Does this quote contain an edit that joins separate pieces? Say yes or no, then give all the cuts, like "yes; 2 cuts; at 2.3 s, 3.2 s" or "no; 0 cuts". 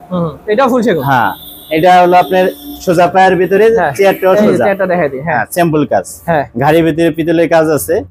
no; 0 cuts